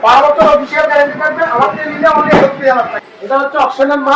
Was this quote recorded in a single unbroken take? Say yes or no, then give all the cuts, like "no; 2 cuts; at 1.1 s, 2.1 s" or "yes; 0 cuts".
no; 1 cut; at 2.9 s